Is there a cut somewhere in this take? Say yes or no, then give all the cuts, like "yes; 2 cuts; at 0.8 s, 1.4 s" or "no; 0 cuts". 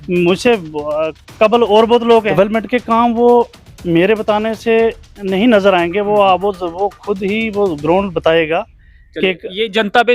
yes; 1 cut; at 2.4 s